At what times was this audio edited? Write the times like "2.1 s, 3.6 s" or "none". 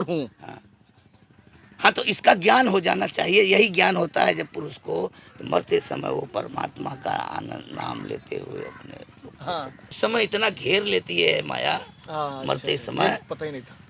10.0 s